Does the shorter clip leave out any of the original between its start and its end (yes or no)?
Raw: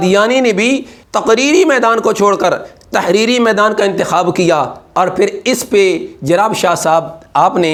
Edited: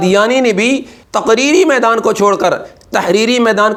no